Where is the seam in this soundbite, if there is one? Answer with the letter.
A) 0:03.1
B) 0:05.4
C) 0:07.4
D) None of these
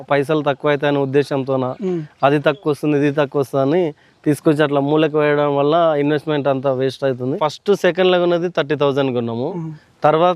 C